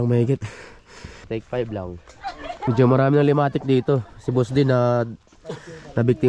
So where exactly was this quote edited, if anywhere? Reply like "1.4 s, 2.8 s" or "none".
1.2 s, 2.5 s